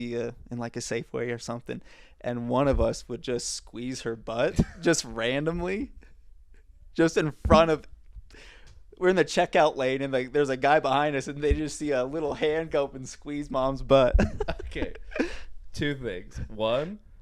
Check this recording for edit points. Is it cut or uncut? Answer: uncut